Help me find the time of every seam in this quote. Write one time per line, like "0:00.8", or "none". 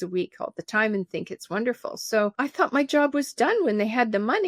0:02.3